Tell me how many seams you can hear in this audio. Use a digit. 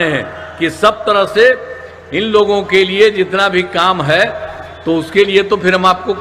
0